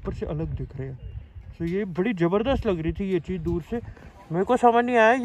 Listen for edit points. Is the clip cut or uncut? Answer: uncut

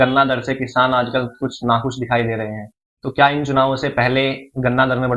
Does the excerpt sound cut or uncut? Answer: uncut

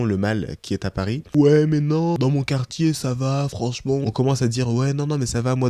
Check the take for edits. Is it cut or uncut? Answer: cut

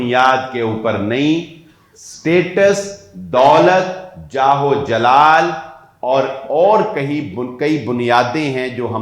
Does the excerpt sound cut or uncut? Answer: uncut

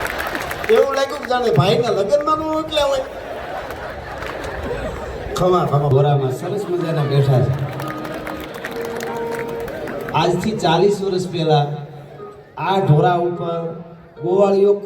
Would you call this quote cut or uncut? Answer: cut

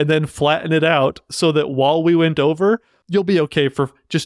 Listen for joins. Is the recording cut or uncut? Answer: cut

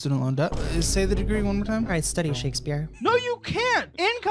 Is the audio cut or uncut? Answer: cut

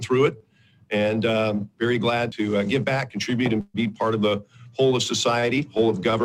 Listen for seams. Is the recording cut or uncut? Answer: cut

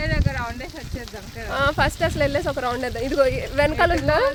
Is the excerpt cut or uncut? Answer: uncut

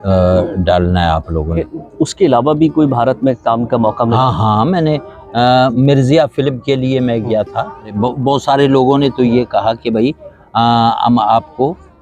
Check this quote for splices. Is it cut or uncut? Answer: cut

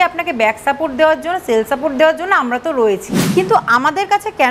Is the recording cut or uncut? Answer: cut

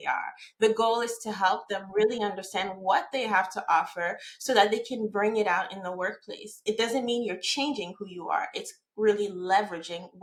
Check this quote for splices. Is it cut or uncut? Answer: uncut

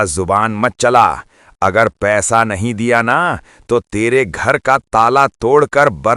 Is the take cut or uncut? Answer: uncut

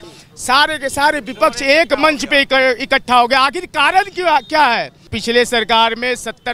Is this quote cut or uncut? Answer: cut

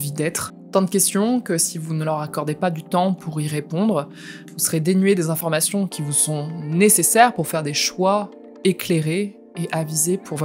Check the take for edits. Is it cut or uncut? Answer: uncut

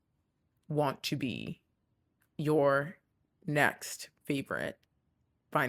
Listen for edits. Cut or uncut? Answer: uncut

